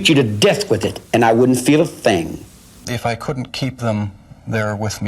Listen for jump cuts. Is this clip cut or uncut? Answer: cut